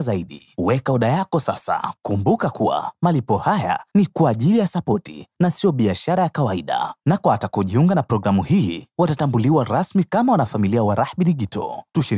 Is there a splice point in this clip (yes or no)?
yes